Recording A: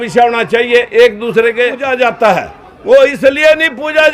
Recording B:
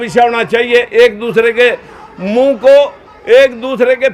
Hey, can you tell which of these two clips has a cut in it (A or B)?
A